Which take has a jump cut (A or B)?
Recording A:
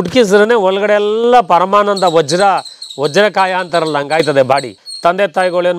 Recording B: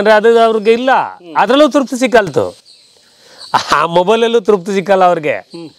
A